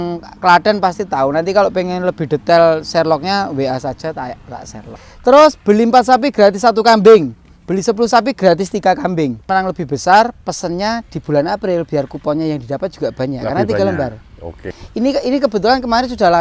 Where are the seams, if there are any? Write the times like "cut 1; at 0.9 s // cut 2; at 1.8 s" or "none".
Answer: cut 1; at 4.9 s // cut 2; at 9.5 s // cut 3; at 14.6 s